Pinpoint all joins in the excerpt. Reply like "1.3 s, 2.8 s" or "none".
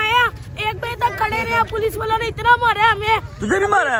none